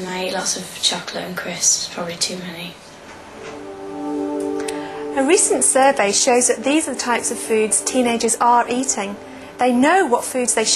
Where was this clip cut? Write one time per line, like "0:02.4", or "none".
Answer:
0:04.2